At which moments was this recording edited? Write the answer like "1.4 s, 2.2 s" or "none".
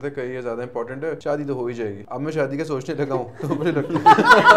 1.2 s, 2.0 s